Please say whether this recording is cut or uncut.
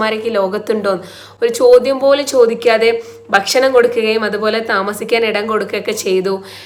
uncut